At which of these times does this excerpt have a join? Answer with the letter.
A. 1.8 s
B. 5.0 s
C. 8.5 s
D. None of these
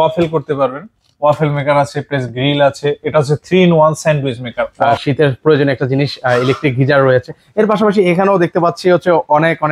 B